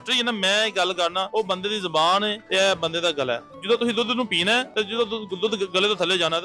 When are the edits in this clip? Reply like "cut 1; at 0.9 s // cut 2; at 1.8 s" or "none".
cut 1; at 1.3 s // cut 2; at 2.4 s // cut 3; at 3.5 s // cut 4; at 4.7 s